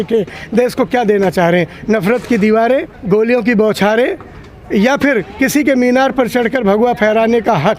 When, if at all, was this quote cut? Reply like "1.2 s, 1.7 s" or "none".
2.9 s